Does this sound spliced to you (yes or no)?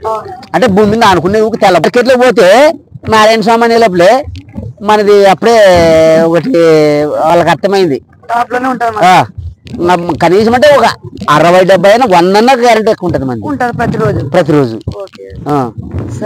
yes